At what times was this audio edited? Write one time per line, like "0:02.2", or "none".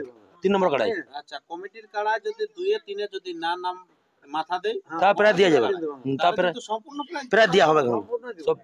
none